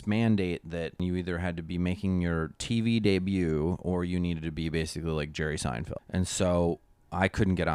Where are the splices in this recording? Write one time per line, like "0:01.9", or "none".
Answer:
0:01.0
0:05.9